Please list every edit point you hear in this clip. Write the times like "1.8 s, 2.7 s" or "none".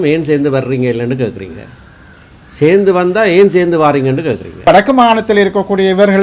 4.6 s